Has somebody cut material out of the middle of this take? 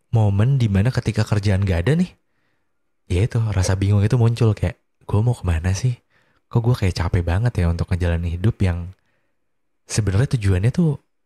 no; 0 cuts

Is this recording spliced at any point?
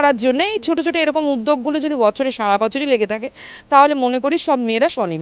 no; 0 cuts

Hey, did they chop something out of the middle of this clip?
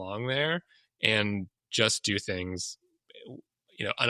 no; 0 cuts

